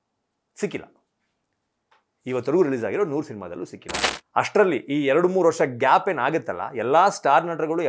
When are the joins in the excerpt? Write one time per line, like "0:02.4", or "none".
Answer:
0:03.9